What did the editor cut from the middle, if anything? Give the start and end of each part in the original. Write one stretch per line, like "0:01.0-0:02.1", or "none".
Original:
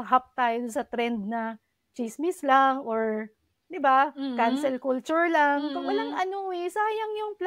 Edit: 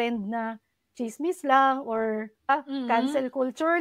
0:03.5-0:04.0